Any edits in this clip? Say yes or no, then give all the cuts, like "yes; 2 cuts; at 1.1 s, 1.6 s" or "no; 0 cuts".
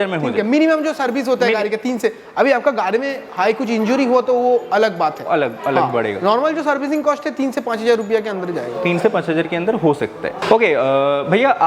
no; 0 cuts